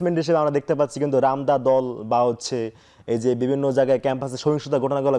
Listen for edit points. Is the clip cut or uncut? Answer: uncut